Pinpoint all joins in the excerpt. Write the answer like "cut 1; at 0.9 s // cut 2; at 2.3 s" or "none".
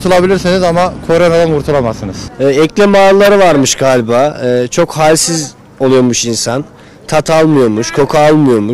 cut 1; at 2.1 s

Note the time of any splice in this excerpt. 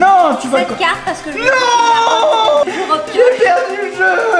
cut 1; at 2.6 s

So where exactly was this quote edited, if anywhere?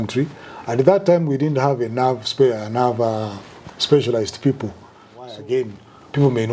cut 1; at 5.3 s

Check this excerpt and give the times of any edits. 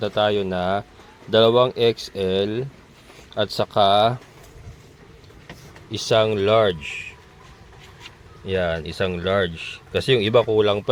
none

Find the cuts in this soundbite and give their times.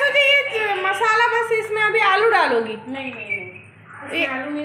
none

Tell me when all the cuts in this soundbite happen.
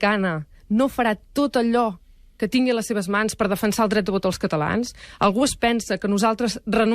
cut 1; at 4.6 s

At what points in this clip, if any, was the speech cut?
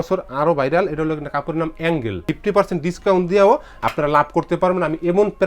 cut 1; at 2.3 s

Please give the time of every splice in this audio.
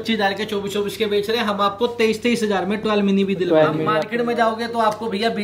cut 1; at 4.0 s

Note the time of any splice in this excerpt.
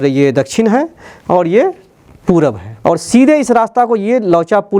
cut 1; at 2.7 s

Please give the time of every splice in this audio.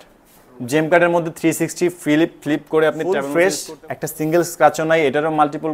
cut 1; at 3.0 s

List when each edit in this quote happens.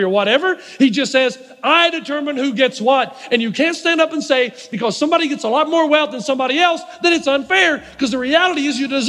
none

